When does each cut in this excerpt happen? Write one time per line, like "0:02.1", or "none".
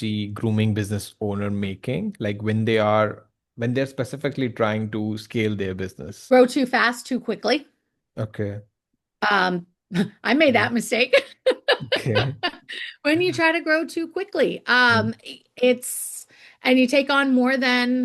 0:06.1